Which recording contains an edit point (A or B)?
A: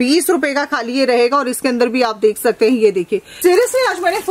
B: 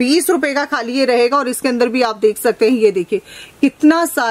A